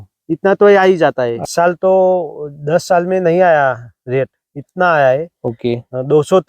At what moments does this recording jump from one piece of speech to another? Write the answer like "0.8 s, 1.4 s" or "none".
1.4 s

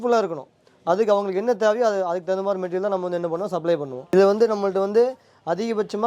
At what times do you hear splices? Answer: 4.1 s

